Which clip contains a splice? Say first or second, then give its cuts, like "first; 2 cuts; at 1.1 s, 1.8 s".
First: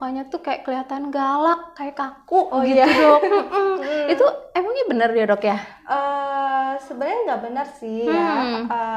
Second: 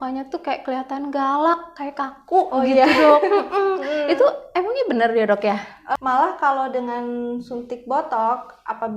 second; 1 cut; at 6.0 s